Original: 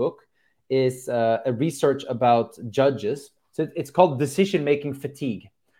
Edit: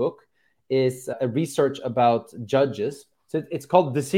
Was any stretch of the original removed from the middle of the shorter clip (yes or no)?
yes